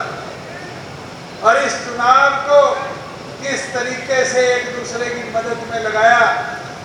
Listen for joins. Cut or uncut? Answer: uncut